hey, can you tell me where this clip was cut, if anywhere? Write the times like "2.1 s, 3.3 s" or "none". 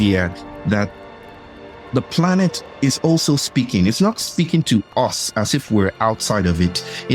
none